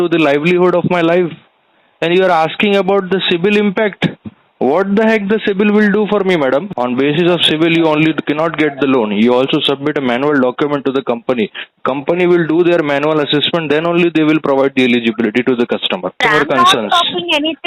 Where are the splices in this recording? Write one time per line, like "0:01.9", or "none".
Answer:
0:06.7
0:16.2